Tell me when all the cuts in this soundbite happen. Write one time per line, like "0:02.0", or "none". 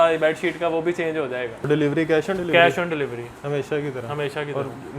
0:01.6